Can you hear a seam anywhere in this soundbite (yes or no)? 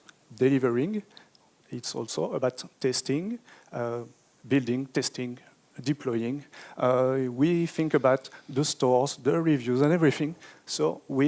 no